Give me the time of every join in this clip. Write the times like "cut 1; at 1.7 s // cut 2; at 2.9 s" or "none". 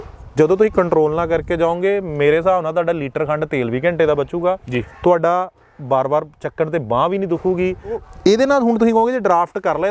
cut 1; at 8.0 s

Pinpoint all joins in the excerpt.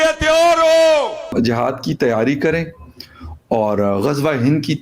cut 1; at 1.3 s

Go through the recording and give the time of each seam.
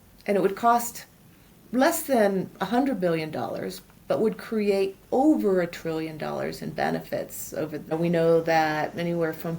cut 1; at 7.9 s

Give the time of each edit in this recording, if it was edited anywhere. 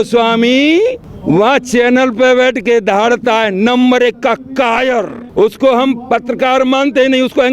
cut 1; at 1.1 s // cut 2; at 5.2 s

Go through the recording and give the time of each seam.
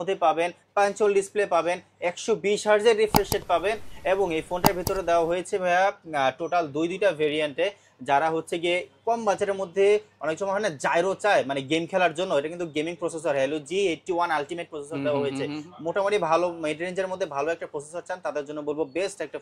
none

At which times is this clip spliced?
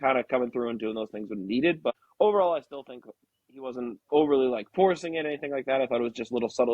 cut 1; at 1.9 s

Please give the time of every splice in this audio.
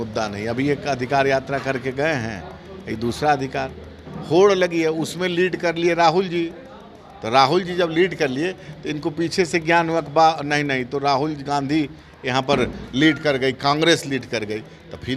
none

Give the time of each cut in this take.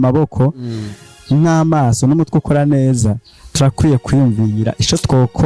none

